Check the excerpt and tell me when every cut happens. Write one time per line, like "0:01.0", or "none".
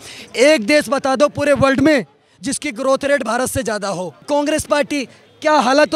0:04.2